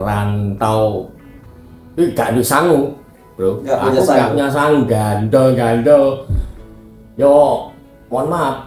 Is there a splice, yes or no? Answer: no